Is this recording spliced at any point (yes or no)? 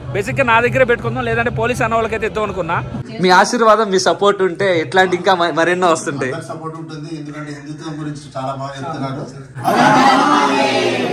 yes